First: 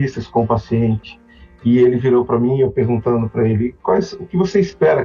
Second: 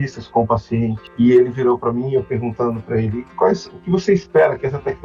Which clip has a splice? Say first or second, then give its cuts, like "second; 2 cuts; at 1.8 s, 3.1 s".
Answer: second; 1 cut; at 1.0 s